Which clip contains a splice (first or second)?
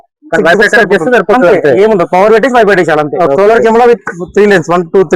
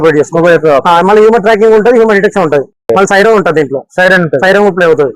first